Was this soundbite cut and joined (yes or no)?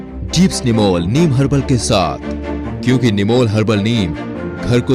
no